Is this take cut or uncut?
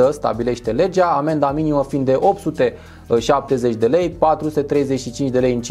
uncut